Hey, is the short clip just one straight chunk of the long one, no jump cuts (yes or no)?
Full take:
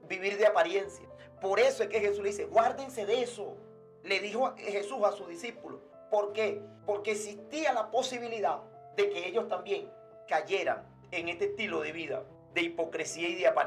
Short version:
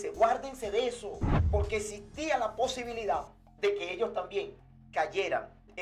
no